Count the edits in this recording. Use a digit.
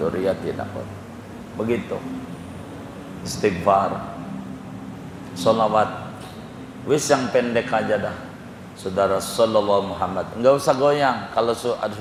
0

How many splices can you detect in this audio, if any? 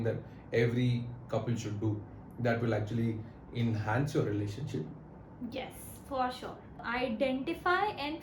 1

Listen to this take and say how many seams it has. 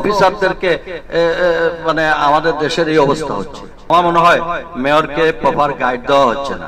1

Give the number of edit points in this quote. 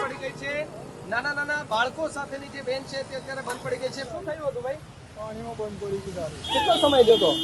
1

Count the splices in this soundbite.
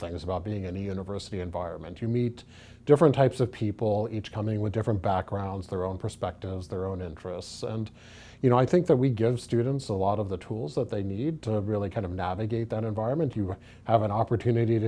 0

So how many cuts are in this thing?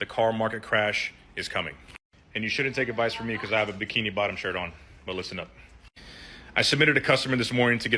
0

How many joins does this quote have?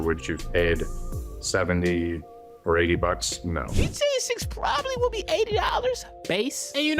1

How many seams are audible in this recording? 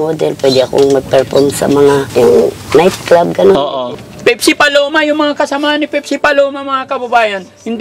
2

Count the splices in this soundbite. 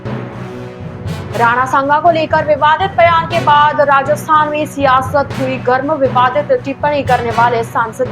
1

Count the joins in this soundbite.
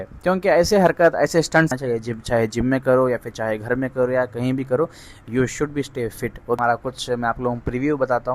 2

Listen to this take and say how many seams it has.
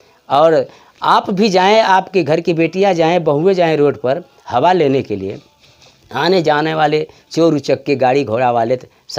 0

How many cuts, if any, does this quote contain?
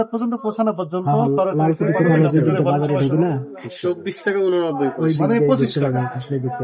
0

